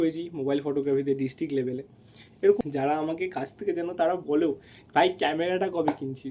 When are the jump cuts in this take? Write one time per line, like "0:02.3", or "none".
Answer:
0:02.6